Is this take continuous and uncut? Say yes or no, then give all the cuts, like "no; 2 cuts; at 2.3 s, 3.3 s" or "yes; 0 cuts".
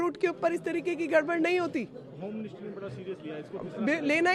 yes; 0 cuts